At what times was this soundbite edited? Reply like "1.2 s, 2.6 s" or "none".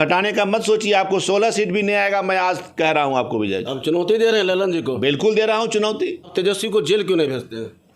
6.2 s